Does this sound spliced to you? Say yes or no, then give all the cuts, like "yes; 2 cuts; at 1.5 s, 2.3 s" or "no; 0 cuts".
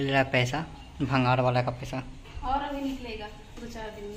no; 0 cuts